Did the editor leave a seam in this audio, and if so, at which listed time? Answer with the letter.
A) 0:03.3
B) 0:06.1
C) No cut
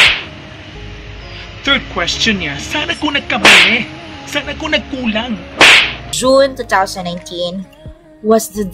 B